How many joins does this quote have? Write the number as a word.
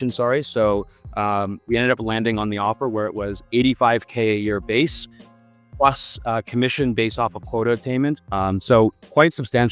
two